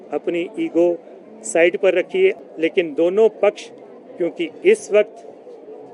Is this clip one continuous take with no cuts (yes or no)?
no